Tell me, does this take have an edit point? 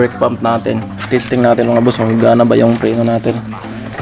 yes; 1 cut; at 1.0 s

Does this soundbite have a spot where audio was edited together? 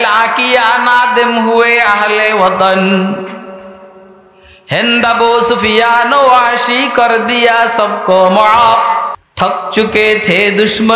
yes; 1 cut; at 9.2 s

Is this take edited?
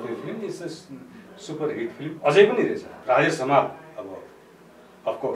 yes; 1 cut; at 2.9 s

